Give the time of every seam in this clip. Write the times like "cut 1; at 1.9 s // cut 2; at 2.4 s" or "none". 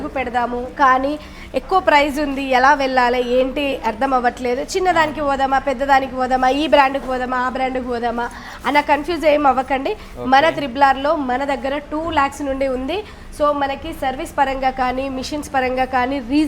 none